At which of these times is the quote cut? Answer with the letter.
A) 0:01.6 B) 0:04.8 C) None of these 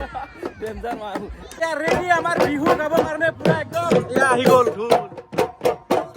A